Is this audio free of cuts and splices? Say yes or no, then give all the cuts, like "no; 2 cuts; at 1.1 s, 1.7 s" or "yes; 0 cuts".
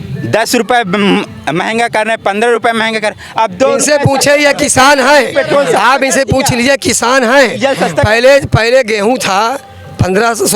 yes; 0 cuts